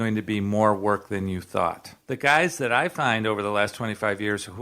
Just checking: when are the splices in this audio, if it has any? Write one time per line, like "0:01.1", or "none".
0:01.9